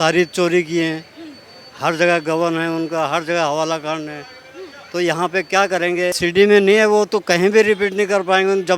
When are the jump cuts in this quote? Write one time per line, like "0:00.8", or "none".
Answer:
0:06.2